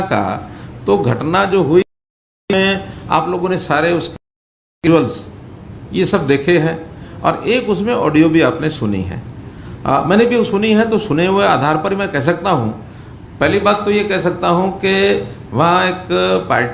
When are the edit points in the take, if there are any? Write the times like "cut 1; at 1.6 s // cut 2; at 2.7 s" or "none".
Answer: none